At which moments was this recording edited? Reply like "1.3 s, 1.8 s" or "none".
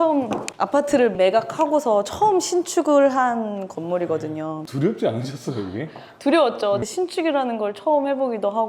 none